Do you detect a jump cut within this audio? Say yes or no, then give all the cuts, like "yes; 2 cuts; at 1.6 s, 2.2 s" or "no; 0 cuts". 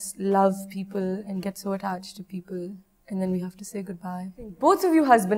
yes; 1 cut; at 4.5 s